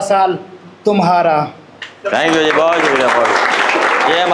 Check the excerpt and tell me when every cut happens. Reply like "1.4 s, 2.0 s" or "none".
none